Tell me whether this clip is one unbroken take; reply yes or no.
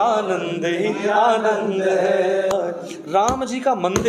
no